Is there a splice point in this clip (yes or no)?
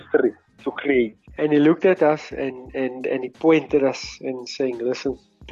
yes